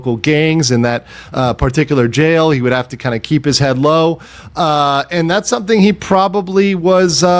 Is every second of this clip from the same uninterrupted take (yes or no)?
yes